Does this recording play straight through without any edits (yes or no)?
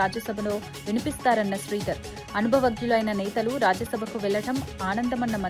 yes